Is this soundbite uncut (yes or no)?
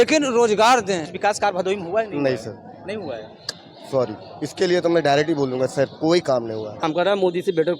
no